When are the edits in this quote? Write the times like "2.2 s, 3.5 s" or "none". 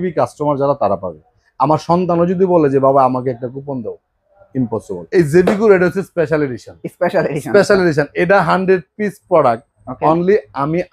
4.9 s